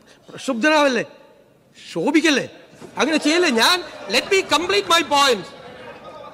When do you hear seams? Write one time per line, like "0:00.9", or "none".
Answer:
none

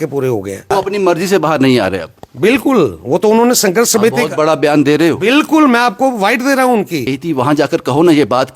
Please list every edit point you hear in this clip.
0:00.7
0:07.1

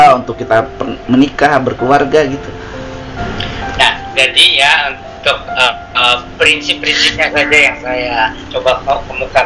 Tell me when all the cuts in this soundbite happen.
none

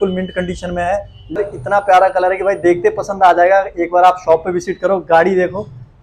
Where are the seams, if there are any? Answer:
0:01.4

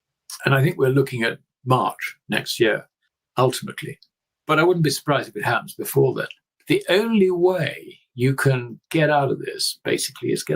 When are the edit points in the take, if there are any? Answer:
0:06.5

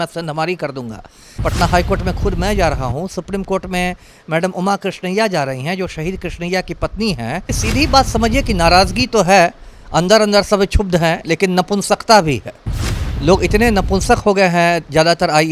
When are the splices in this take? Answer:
0:01.2
0:07.5

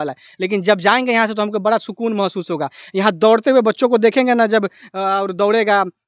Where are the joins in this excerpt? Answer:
none

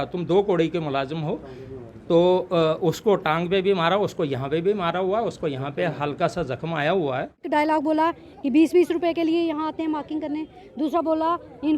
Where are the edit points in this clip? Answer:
0:07.4

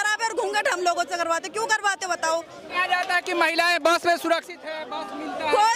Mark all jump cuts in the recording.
0:02.7

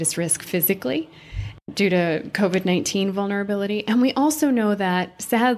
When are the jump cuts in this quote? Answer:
0:01.7

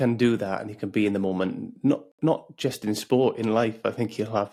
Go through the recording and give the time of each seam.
none

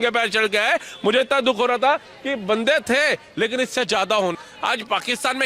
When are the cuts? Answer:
0:04.3

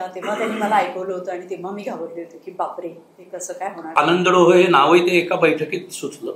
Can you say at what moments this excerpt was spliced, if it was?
0:03.9

